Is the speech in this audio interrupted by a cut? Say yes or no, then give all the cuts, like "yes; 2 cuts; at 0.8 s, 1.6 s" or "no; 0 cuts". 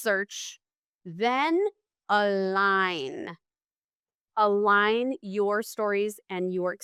no; 0 cuts